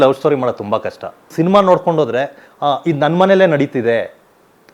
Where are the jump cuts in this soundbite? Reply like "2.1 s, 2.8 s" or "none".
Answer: 1.3 s